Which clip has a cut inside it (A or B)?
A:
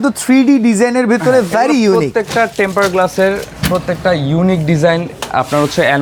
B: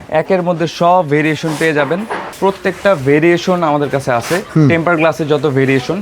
B